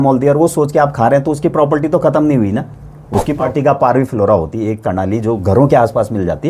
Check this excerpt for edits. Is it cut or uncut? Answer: cut